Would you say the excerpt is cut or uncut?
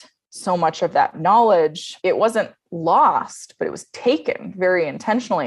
cut